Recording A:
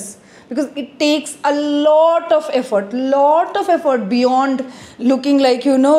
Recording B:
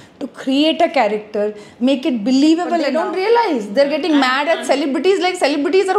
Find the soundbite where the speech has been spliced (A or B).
B